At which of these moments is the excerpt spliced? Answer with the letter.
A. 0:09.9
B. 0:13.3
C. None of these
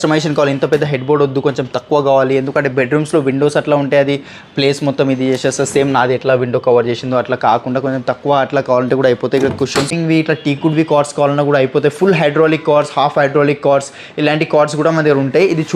A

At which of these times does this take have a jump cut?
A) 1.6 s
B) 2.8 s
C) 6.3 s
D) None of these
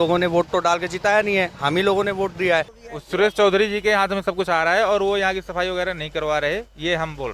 B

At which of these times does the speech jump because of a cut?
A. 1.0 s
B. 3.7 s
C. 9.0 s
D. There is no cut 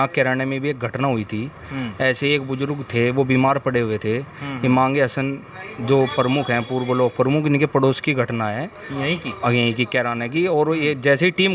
D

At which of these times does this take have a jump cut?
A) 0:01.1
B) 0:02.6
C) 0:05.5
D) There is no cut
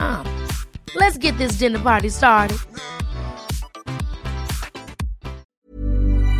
C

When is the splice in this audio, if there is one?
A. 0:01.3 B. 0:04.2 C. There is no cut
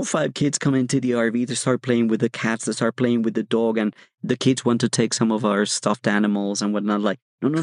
B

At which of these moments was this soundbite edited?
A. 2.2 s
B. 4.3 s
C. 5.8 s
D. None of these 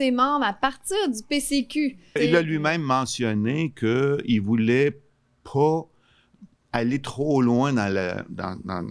A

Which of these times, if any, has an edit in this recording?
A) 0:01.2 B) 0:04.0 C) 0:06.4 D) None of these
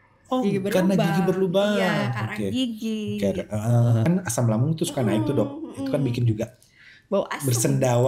B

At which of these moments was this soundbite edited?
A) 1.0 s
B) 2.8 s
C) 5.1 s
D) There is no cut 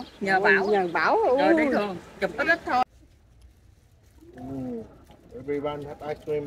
B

